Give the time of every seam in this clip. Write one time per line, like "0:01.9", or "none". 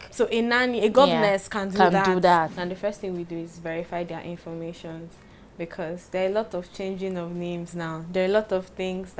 0:02.6